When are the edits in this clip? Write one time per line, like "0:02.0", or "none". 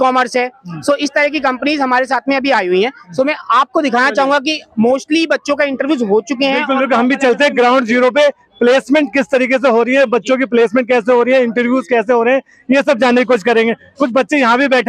none